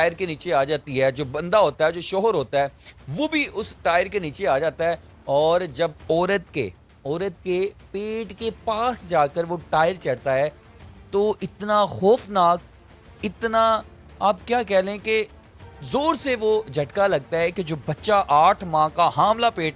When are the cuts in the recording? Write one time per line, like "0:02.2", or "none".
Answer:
none